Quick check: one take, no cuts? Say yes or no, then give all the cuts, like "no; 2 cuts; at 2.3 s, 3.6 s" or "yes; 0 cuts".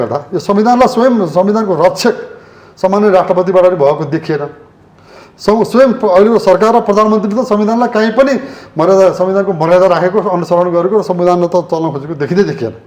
yes; 0 cuts